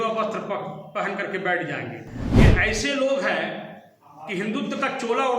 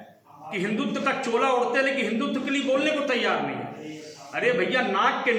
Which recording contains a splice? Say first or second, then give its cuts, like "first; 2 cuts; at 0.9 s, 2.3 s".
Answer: first; 1 cut; at 2.2 s